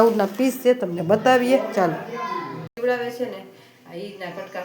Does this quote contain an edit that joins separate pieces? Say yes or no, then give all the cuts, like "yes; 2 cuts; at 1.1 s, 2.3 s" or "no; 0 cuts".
yes; 1 cut; at 2.7 s